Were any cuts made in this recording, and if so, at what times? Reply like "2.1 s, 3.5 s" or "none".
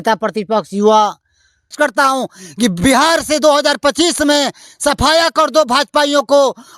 1.7 s